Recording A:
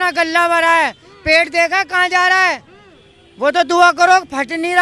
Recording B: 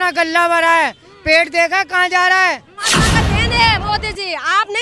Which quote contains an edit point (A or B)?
B